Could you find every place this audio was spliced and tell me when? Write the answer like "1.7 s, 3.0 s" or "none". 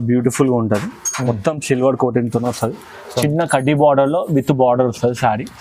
none